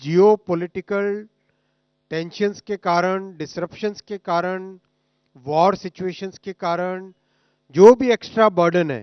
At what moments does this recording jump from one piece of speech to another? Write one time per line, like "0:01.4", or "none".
none